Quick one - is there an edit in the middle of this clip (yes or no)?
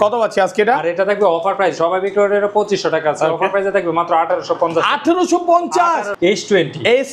yes